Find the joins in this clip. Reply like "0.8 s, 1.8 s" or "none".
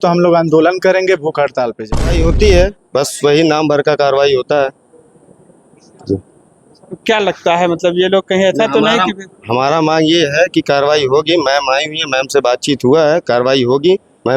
2.1 s